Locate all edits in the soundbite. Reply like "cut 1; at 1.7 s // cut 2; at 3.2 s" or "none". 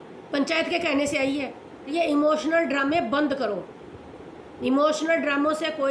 cut 1; at 1.9 s